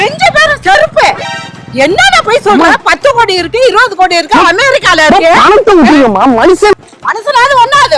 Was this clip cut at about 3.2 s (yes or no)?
no